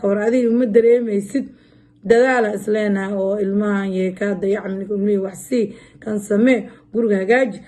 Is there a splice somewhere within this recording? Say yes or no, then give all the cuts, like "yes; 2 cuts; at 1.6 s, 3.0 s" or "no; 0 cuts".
no; 0 cuts